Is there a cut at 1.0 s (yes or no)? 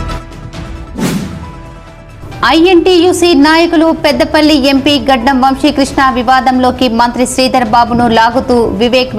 yes